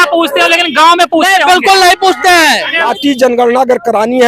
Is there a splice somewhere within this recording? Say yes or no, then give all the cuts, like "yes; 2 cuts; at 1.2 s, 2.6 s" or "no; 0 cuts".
yes; 1 cut; at 3.0 s